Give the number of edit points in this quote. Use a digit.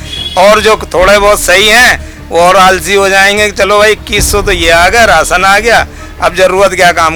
0